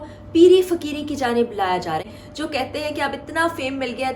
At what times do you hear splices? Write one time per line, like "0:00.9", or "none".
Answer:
0:02.0